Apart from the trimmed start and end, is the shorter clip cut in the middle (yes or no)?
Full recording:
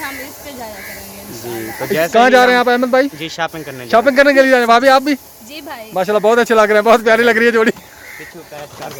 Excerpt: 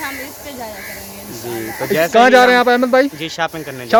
no